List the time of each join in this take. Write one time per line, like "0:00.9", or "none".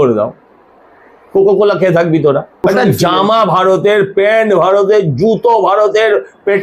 0:02.5